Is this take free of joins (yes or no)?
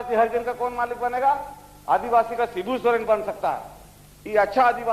yes